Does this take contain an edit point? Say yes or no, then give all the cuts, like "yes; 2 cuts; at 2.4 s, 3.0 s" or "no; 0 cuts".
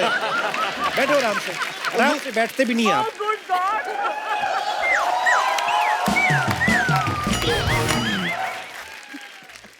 yes; 1 cut; at 8.9 s